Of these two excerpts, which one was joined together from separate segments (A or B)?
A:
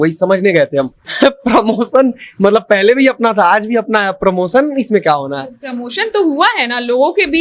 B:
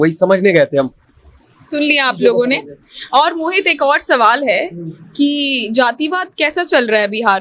A